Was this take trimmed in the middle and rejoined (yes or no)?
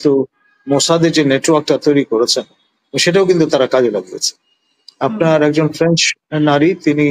no